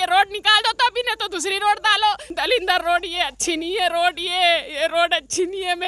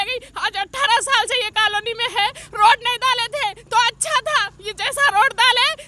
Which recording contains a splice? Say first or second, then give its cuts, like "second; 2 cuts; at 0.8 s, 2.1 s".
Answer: first; 1 cut; at 2.2 s